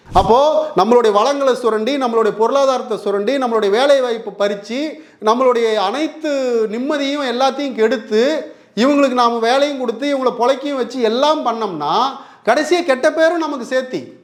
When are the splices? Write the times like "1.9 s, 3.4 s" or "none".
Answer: none